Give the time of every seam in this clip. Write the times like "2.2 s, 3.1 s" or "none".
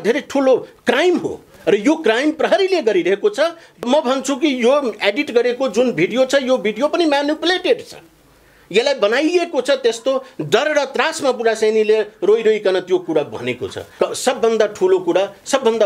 3.8 s, 13.8 s